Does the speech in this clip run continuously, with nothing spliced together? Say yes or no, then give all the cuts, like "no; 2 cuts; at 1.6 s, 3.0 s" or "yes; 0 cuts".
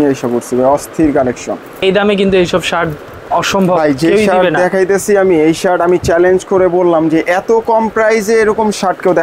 no; 1 cut; at 1.8 s